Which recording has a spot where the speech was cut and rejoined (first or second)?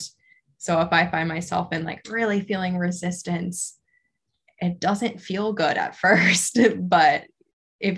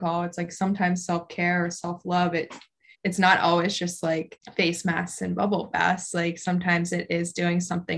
second